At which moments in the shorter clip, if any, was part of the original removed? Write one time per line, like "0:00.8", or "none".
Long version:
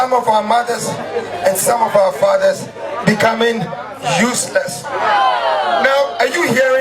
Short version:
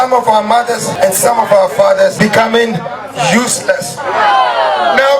0:00.9
0:02.1